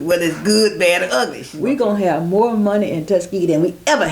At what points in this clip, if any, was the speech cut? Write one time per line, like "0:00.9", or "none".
0:01.4

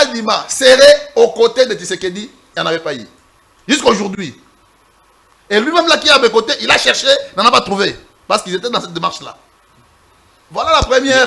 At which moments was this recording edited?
none

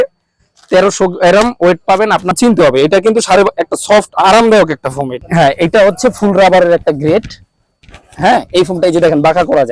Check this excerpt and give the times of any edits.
0:02.4
0:05.2

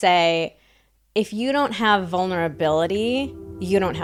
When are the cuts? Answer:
none

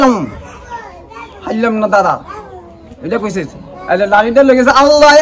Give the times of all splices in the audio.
none

